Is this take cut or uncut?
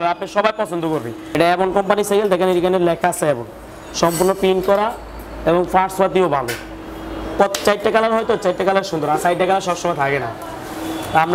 cut